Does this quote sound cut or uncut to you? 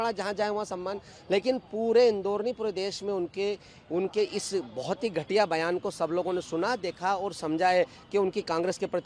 uncut